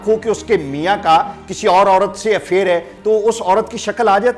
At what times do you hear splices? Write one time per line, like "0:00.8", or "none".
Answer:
none